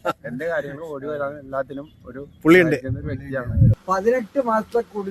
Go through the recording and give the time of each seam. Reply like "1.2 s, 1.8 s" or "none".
3.8 s